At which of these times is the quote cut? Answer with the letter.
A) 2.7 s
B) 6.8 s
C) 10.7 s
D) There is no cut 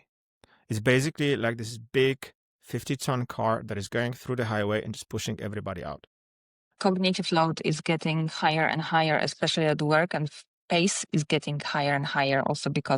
B